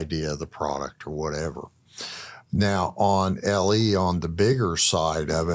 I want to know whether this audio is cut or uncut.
uncut